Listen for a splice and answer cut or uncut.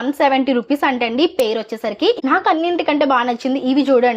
cut